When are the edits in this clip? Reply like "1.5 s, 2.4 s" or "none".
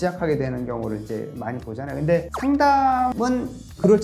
2.3 s, 3.1 s